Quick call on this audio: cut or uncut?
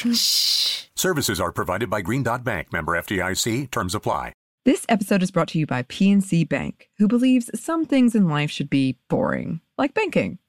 cut